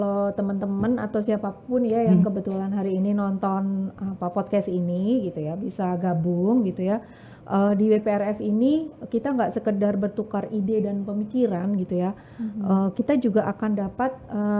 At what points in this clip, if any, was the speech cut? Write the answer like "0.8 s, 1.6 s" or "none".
none